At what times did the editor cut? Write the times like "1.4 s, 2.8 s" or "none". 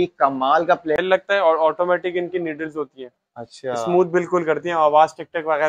1.0 s

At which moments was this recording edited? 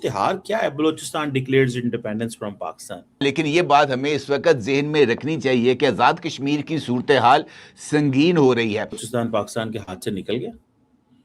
3.2 s, 8.9 s

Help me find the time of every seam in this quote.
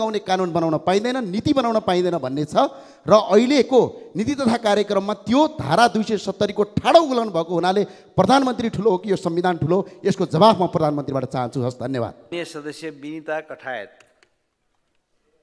none

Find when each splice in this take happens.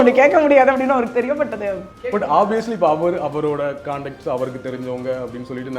2.0 s

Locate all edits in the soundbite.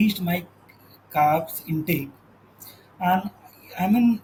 none

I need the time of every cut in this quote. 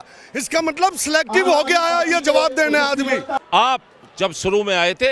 3.4 s

